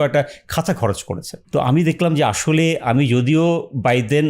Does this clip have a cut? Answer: no; 0 cuts

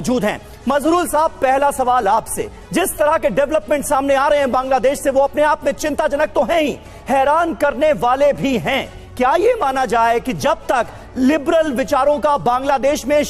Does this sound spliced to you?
no; 0 cuts

